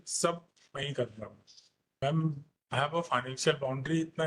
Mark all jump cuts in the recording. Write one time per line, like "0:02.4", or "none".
0:02.0